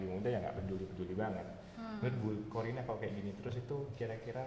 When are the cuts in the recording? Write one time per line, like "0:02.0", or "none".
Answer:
none